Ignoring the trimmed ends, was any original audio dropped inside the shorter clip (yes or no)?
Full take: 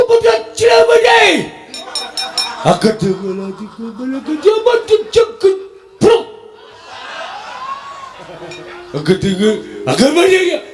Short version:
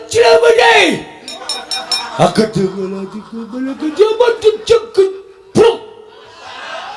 no